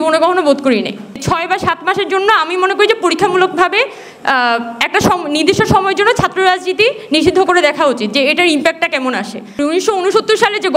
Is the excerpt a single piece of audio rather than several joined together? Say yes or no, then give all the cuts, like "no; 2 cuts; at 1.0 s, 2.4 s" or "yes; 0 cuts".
no; 2 cuts; at 1.2 s, 9.6 s